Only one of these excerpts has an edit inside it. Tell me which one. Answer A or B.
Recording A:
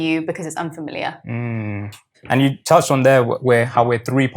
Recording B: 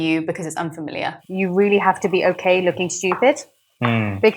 B